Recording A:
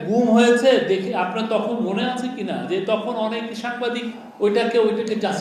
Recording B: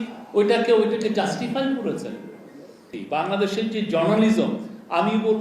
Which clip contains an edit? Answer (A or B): B